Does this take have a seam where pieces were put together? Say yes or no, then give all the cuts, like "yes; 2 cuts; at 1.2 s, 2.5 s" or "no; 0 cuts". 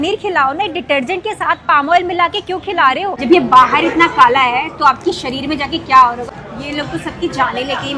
yes; 2 cuts; at 3.1 s, 6.3 s